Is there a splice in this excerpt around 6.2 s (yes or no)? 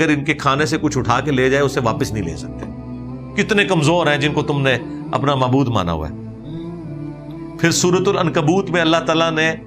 no